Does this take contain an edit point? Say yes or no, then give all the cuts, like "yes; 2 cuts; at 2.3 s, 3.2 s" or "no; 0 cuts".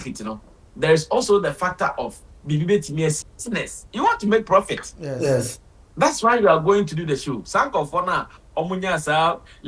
yes; 1 cut; at 3.2 s